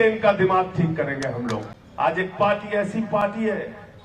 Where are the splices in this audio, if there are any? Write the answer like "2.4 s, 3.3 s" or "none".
1.8 s